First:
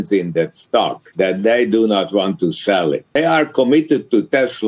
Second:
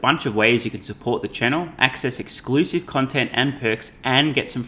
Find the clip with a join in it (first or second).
first